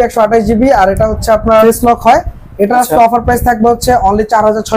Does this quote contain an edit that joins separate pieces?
yes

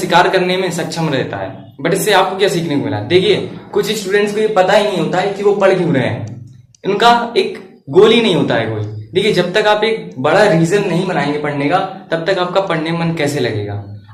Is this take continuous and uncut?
yes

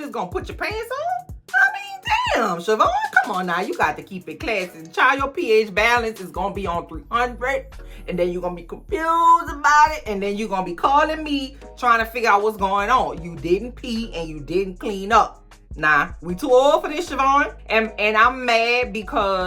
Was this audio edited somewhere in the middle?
yes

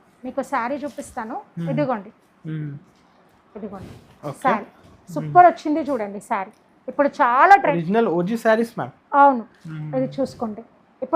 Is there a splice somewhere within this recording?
yes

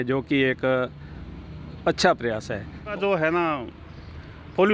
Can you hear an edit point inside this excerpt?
yes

